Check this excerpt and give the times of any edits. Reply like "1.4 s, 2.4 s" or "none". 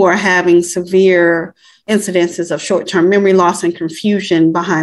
none